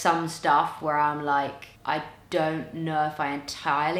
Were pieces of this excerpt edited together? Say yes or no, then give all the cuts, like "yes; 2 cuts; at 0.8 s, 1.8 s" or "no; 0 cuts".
no; 0 cuts